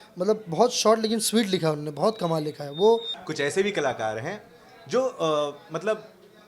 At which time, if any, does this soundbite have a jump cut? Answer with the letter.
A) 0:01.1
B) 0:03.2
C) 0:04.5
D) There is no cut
B